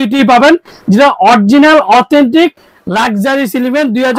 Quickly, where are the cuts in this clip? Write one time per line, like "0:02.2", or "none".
none